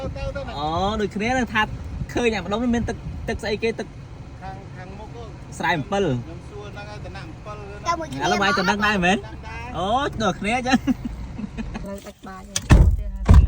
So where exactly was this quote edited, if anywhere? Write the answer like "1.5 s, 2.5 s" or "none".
11.9 s